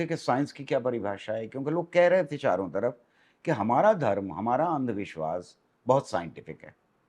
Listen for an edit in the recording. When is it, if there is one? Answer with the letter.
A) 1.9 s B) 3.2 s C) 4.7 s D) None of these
D